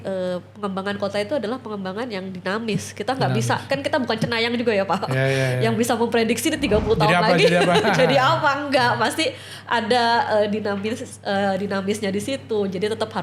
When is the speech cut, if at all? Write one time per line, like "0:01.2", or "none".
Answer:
none